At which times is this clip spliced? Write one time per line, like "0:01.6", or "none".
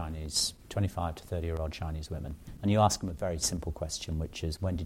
0:02.4

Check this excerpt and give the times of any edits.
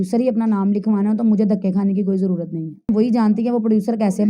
0:02.9

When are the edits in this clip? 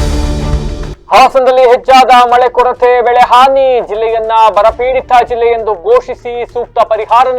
0:00.9

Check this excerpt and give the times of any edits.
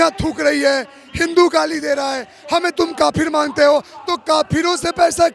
none

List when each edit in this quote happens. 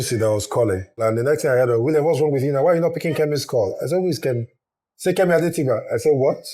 0:01.0

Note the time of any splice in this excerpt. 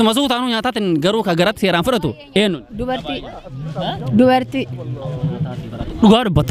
none

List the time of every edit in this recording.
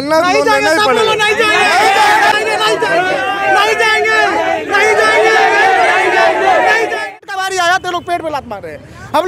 0:02.3
0:06.8

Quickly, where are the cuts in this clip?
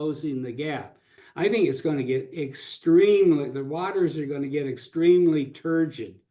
0:01.2

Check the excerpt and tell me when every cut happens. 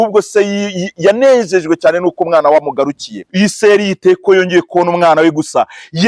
0:03.2

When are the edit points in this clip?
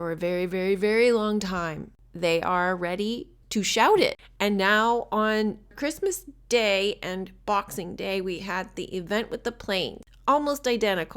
0:04.3

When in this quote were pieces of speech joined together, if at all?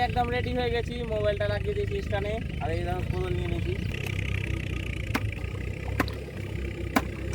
0:03.9
0:05.4
0:06.4

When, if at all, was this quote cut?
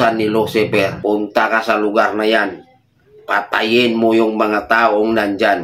0:01.0

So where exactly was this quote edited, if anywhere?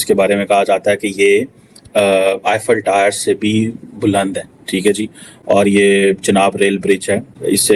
none

